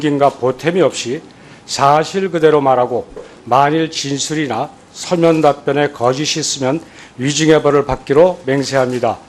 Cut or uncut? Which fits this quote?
cut